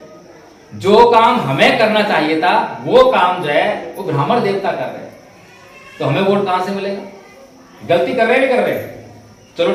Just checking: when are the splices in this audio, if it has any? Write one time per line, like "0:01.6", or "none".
none